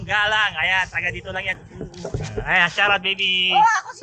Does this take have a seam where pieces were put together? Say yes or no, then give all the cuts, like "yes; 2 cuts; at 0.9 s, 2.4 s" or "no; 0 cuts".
yes; 1 cut; at 1.5 s